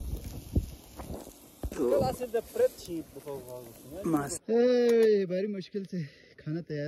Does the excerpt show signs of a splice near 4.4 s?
yes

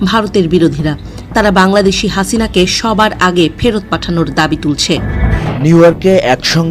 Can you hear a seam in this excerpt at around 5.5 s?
yes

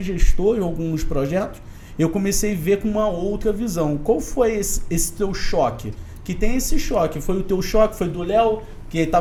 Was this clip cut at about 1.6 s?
no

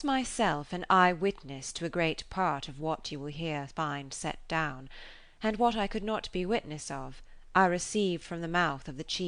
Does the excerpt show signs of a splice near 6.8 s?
no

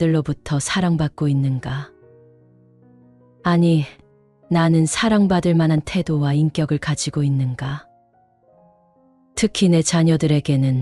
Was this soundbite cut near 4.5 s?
no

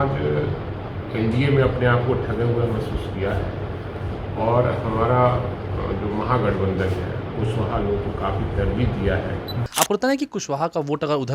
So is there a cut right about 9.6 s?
yes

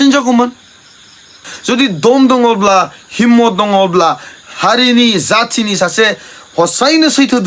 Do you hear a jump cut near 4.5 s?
no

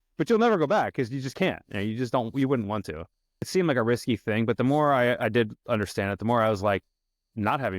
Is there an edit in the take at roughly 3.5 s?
yes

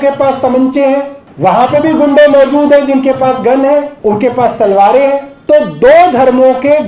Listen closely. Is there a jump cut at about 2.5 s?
no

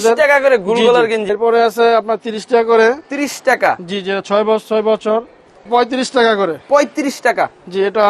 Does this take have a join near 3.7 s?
no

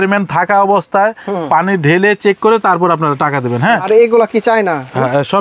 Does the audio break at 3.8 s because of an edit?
yes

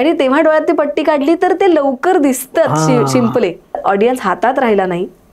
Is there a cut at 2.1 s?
no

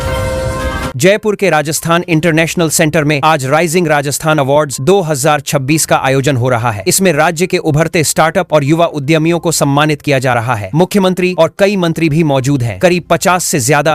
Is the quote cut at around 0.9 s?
yes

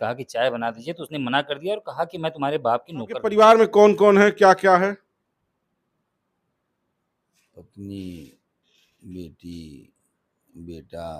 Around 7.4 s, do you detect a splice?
no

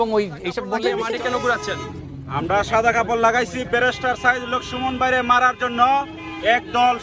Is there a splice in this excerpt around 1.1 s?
yes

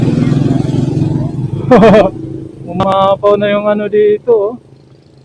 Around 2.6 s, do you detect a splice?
no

